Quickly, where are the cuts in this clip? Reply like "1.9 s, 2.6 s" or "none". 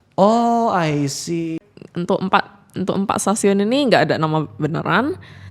1.6 s

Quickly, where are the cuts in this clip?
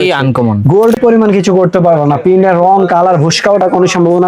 1.0 s

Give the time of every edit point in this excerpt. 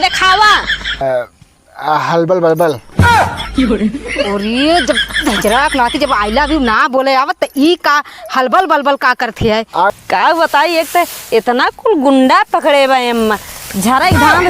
1.0 s, 9.9 s

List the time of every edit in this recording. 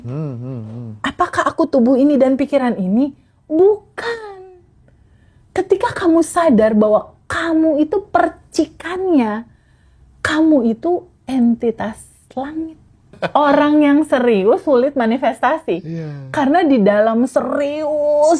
13.2 s

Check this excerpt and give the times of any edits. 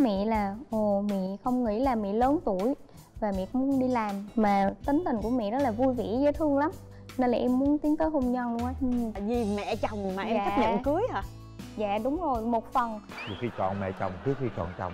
6.9 s, 9.1 s, 13.1 s

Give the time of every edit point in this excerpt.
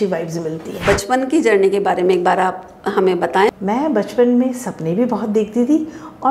0.8 s, 3.5 s

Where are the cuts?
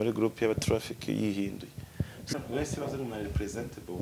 2.3 s

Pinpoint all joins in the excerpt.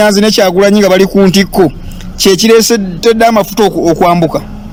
none

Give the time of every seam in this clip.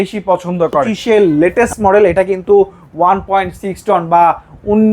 0.9 s

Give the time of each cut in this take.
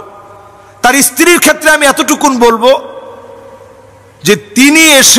none

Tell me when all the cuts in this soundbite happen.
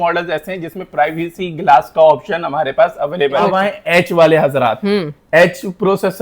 3.5 s

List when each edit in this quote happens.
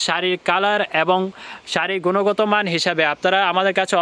none

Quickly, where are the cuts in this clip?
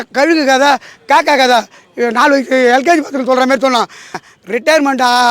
4.2 s

